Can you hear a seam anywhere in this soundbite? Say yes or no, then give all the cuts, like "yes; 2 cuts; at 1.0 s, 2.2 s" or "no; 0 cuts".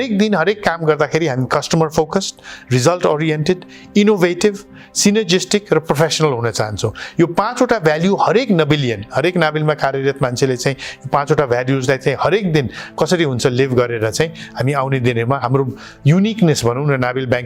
no; 0 cuts